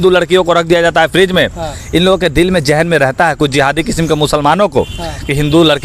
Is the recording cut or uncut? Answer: uncut